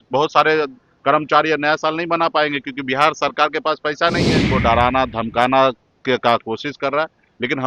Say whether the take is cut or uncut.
cut